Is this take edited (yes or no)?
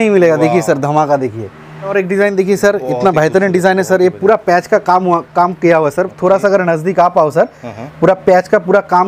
yes